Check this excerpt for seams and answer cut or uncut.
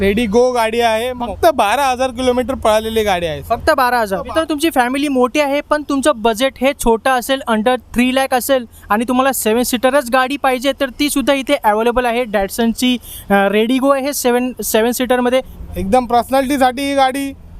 cut